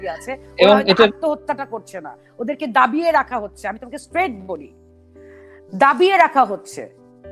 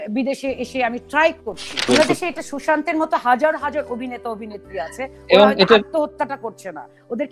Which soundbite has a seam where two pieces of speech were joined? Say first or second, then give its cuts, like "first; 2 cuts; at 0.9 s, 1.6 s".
second; 1 cut; at 1.9 s